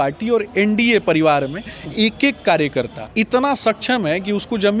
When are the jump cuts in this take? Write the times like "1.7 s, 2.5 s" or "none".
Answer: 3.0 s